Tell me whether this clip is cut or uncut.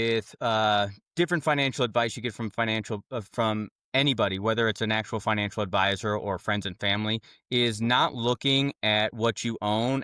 uncut